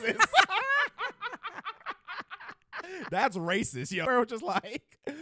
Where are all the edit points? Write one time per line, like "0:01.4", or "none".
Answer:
0:04.0